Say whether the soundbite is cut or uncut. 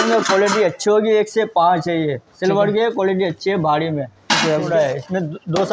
cut